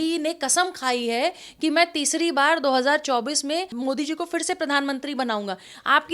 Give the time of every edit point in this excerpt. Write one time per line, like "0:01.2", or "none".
0:03.7